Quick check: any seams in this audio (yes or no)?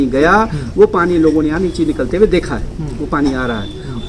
no